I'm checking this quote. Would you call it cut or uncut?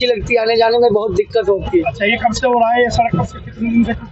uncut